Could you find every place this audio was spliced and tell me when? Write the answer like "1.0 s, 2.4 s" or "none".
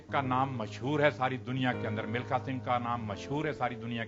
none